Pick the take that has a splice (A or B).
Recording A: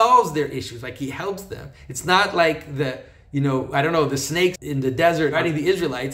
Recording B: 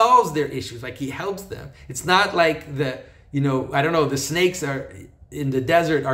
A